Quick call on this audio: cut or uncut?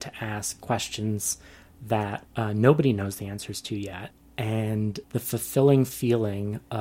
cut